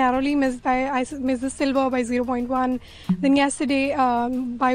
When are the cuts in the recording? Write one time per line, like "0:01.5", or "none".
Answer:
none

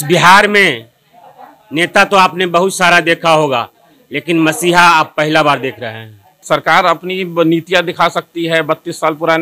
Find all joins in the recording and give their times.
0:06.3

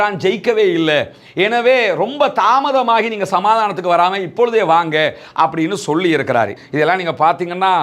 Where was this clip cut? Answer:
0:06.6

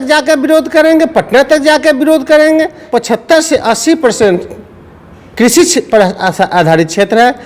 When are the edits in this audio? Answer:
0:02.8

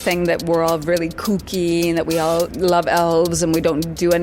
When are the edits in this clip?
0:02.5

